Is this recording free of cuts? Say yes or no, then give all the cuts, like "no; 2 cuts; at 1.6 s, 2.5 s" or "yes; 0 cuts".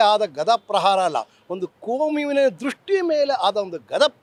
yes; 0 cuts